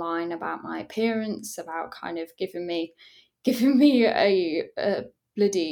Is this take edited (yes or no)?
no